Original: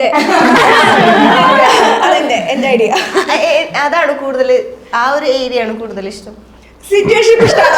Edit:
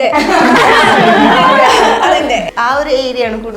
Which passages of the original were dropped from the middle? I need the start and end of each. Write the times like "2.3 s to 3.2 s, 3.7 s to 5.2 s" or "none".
2.5 s to 4.8 s

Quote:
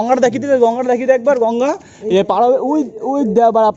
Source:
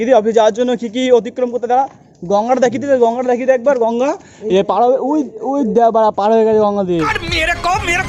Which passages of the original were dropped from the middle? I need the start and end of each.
none

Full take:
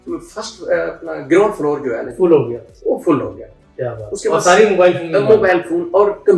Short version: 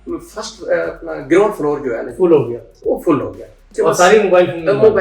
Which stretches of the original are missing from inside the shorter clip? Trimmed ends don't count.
3.6 s to 4.0 s

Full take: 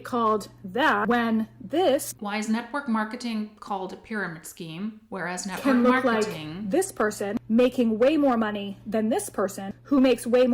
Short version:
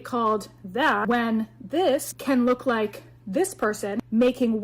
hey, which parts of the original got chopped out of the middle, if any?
2.1 s to 5.5 s

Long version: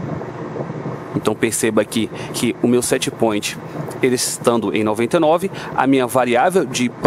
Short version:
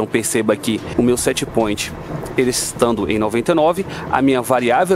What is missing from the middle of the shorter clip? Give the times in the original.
2.2 s to 2.6 s

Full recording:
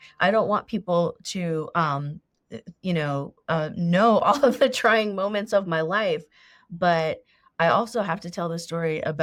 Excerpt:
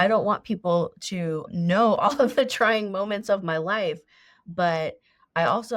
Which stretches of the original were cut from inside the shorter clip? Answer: 1.7 s to 3.7 s

